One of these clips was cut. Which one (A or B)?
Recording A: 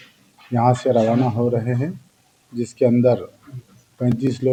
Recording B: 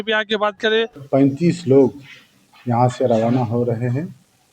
B